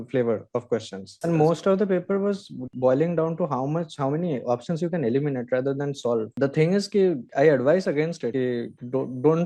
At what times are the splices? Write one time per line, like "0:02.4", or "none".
0:01.1
0:02.7
0:06.4